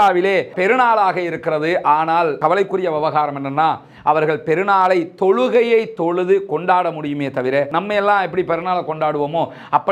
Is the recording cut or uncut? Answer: uncut